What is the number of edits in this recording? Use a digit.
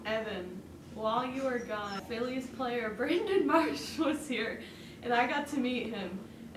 1